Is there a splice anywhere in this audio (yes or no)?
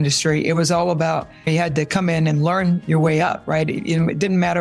yes